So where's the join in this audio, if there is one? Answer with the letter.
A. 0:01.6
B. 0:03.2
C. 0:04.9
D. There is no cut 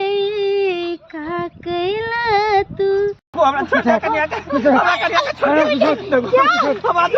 B